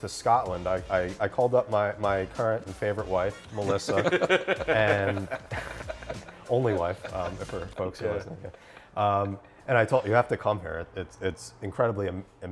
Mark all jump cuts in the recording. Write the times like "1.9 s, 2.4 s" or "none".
none